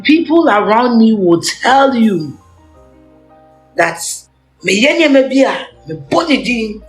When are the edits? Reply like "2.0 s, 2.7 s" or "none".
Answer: 2.4 s, 3.7 s

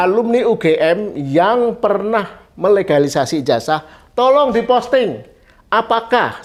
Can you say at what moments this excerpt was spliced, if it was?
none

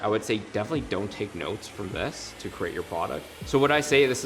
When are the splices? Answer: 3.3 s

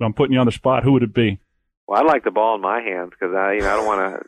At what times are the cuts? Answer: none

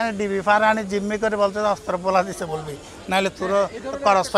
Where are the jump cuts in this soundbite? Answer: none

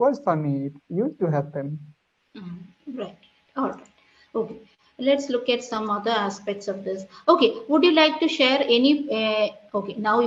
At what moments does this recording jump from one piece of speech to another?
none

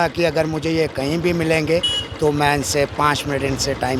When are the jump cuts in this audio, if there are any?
none

